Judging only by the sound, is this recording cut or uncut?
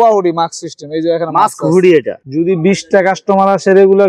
cut